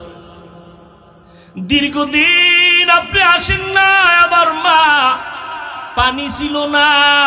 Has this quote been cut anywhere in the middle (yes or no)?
no